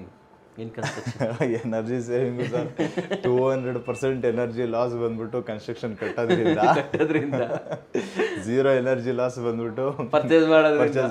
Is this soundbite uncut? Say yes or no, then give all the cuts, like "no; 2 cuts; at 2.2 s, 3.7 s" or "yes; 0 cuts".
yes; 0 cuts